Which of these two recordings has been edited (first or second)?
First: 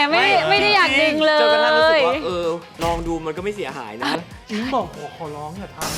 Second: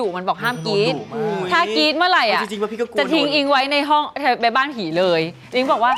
first